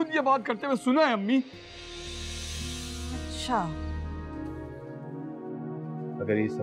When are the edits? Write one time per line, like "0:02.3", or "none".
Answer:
0:04.3